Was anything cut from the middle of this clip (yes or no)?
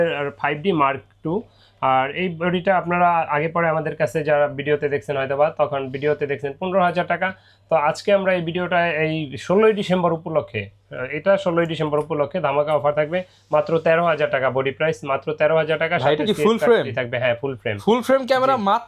no